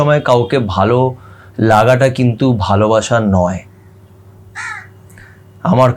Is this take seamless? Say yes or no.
yes